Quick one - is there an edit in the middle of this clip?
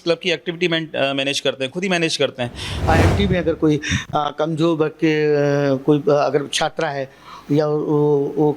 yes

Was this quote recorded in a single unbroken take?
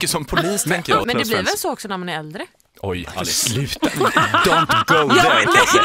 no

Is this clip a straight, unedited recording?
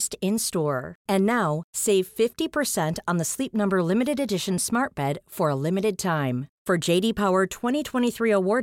yes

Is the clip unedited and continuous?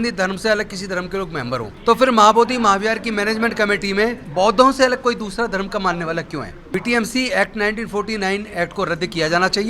no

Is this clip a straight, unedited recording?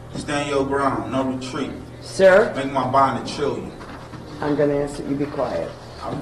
yes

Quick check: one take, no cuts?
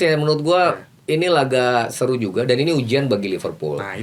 yes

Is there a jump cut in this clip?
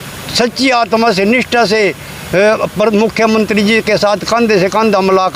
no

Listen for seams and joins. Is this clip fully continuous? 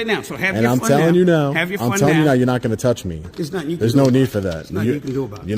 no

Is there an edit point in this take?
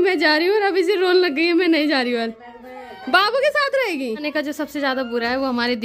yes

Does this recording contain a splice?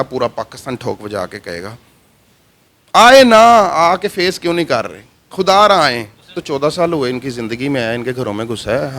yes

